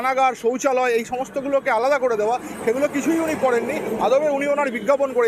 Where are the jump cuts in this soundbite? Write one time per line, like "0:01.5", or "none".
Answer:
none